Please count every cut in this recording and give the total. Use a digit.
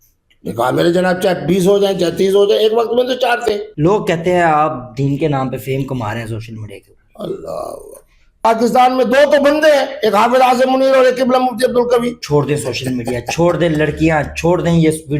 3